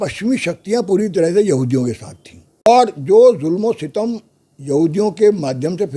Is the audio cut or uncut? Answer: cut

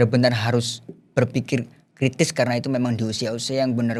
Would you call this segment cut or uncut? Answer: uncut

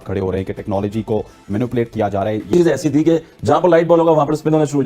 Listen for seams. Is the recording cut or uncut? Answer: cut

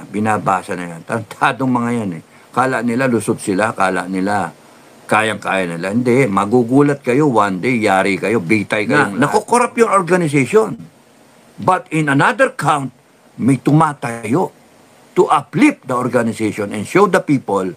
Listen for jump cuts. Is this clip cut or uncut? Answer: cut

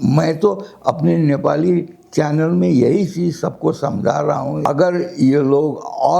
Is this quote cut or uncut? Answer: cut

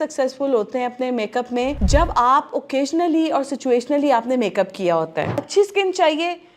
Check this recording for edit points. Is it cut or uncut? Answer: cut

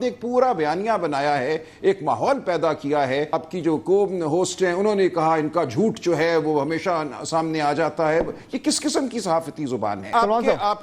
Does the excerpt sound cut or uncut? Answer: cut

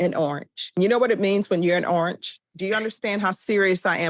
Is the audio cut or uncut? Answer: cut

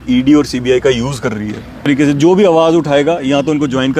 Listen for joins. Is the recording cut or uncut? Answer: cut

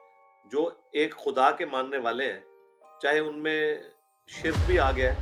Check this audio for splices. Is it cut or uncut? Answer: uncut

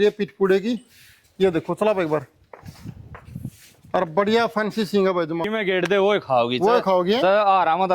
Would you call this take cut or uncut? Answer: cut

